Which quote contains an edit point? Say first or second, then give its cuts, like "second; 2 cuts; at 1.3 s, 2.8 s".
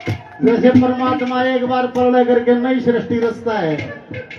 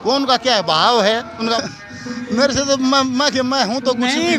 second; 1 cut; at 1.6 s